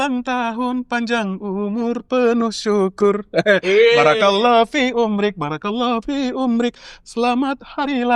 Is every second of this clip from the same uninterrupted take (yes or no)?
yes